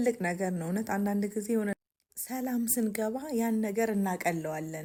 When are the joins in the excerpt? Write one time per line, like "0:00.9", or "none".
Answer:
none